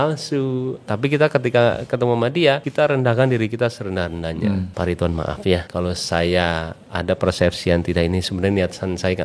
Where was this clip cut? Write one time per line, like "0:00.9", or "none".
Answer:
0:00.9
0:02.7
0:04.7
0:05.7